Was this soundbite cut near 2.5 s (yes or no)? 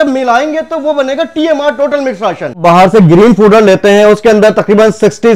yes